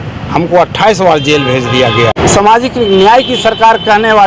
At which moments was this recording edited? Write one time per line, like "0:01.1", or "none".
0:02.1